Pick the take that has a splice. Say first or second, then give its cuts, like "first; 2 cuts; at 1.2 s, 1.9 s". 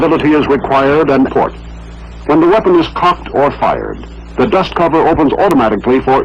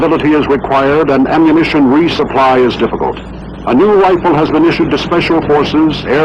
second; 1 cut; at 1.3 s